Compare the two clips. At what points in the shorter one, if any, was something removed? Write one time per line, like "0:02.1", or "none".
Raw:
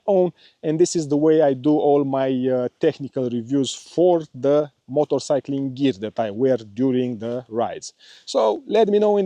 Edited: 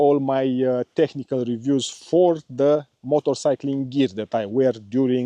none

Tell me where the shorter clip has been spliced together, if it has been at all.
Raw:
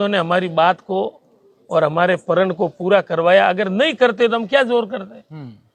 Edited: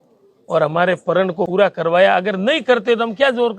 0:01.5

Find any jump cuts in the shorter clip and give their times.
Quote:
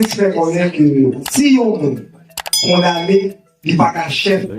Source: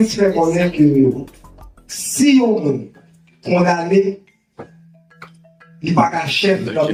0:01.2
0:03.5

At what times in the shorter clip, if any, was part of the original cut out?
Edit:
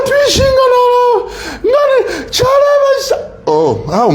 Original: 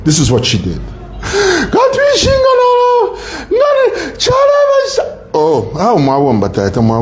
none

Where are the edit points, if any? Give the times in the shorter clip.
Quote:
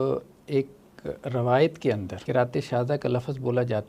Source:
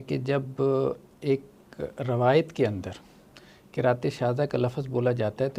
0:02.1

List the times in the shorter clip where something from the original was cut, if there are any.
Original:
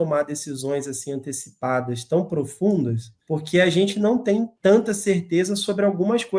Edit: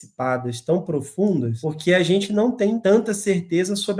0:01.6
0:02.8

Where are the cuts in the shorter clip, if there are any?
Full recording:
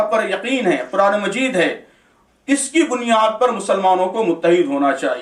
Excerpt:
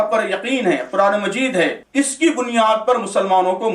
0:01.8

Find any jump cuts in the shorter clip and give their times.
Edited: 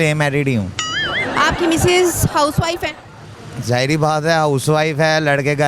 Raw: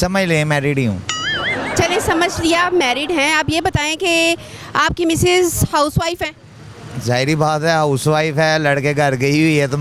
0:01.2

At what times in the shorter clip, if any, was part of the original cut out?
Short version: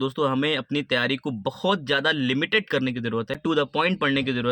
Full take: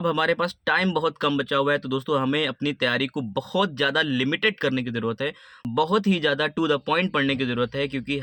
0:03.4

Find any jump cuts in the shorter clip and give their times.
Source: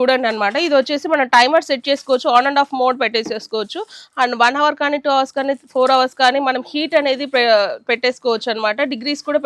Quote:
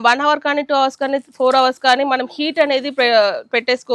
none

